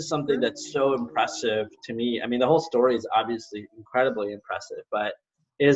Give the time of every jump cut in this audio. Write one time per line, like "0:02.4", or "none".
none